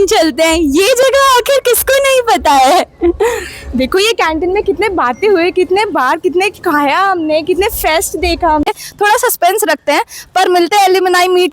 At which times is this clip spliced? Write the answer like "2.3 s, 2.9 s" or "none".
8.7 s

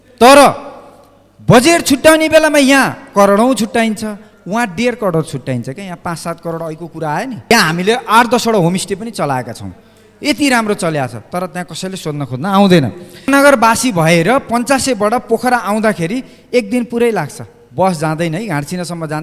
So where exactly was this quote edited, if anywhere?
7.5 s, 13.3 s

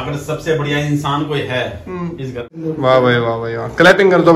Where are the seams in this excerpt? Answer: 2.5 s

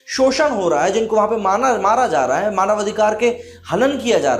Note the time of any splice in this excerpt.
none

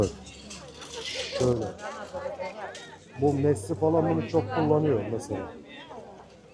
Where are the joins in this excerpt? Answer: none

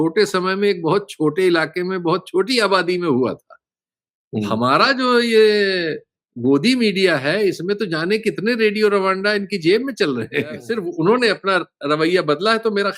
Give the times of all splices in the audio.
10.8 s

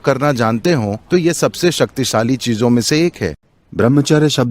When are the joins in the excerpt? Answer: 3.3 s

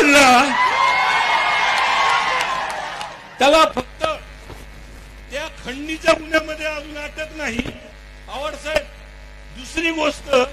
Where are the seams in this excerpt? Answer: none

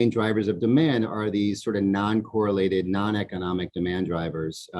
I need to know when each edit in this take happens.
none

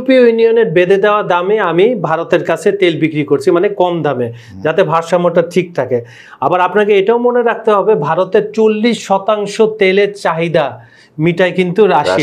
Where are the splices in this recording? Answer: none

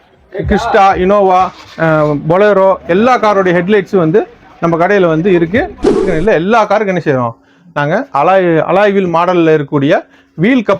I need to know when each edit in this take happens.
6.0 s

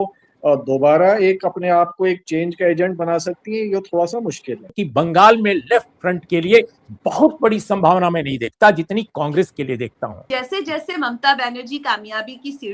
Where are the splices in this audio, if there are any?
4.8 s, 10.3 s

